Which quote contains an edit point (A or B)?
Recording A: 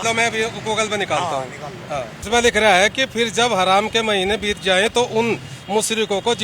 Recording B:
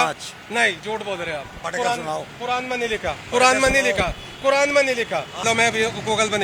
A